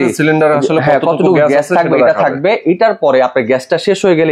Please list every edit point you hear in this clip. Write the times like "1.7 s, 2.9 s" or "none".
none

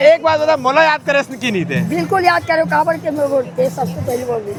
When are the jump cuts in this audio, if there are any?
none

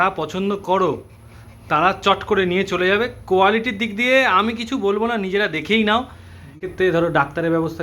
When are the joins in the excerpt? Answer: 6.5 s

